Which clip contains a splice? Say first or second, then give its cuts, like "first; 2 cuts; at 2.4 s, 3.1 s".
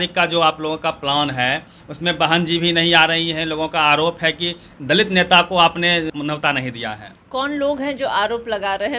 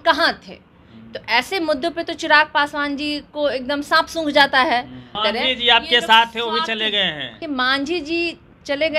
second; 2 cuts; at 5.1 s, 7.4 s